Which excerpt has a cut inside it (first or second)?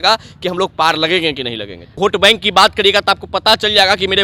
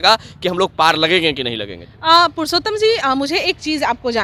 first